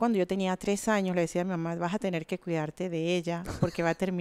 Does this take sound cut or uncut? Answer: uncut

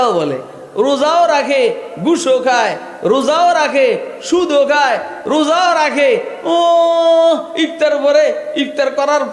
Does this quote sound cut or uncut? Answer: uncut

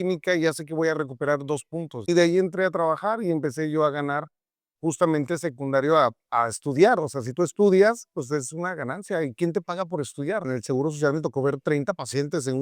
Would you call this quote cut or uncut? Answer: cut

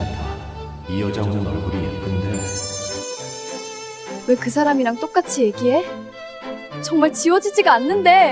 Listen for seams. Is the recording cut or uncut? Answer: uncut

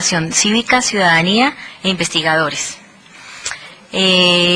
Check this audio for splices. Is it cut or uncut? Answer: uncut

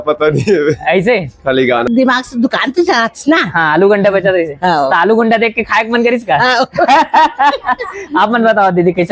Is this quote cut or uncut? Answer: cut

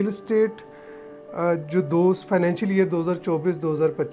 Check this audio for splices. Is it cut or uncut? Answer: uncut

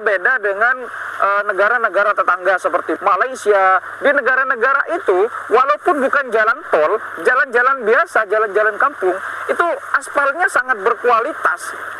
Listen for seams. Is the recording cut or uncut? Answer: cut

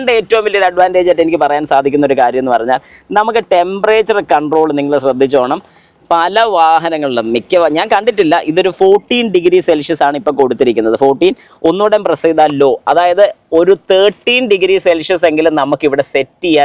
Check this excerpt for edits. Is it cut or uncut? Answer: uncut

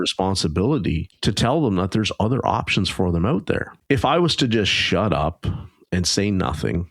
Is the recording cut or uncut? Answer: cut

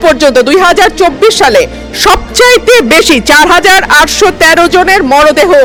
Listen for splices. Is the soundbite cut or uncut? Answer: uncut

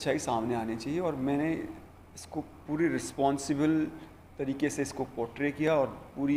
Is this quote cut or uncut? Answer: uncut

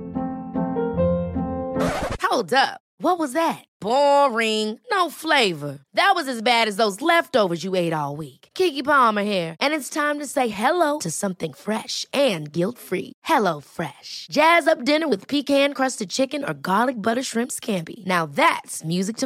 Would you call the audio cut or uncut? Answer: uncut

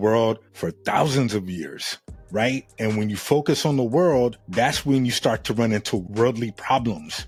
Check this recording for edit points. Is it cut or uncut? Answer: uncut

